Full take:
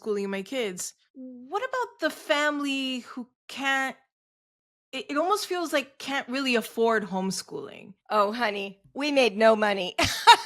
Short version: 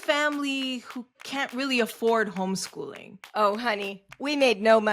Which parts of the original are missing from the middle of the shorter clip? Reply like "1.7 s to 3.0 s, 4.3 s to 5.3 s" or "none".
3.4 s to 6.0 s